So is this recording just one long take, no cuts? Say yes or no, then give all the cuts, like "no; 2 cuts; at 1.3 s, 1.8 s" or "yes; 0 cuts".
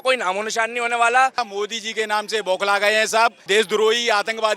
no; 2 cuts; at 1.4 s, 3.4 s